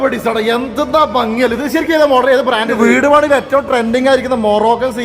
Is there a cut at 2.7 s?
yes; 1 cut; at 2.7 s

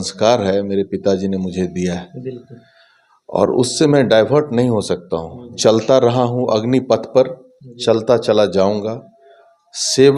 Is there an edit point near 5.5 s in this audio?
yes; 1 cut; at 5.5 s

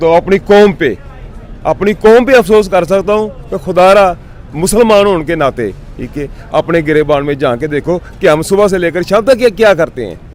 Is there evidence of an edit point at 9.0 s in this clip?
no; 0 cuts

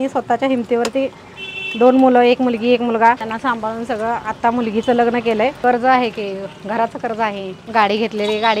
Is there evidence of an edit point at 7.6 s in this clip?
yes; 3 cuts; at 3.2 s, 5.6 s, 7.6 s

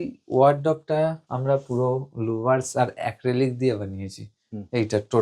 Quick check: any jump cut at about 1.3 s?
yes; 1 cut; at 1.3 s

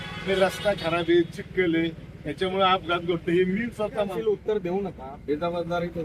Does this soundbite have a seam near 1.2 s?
no; 1 cut; at 4.1 s

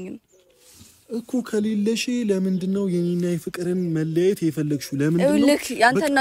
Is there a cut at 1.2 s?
no; 0 cuts

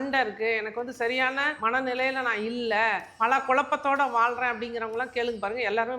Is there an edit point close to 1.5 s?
yes; 2 cuts; at 1.5 s, 3.1 s

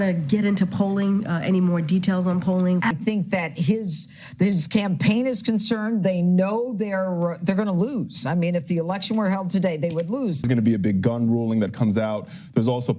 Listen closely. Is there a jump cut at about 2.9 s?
yes; 2 cuts; at 2.9 s, 10.5 s

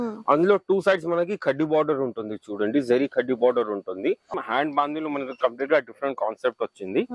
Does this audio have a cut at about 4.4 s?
yes; 1 cut; at 4.4 s

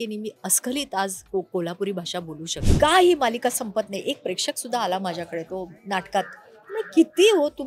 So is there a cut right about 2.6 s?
yes; 1 cut; at 2.6 s

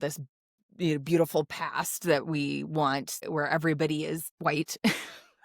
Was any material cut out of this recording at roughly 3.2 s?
yes; 2 cuts; at 3.2 s, 4.3 s

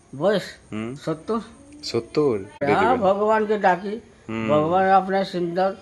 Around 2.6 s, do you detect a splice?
yes; 1 cut; at 2.6 s

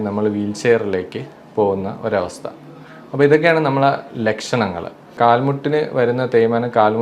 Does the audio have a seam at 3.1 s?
no; 1 cut; at 5.2 s

